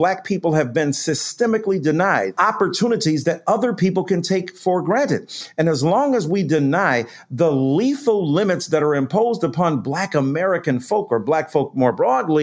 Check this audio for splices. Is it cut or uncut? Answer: uncut